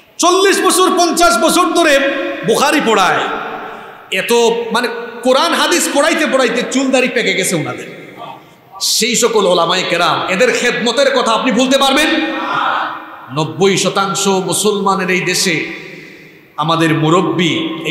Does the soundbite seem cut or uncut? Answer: uncut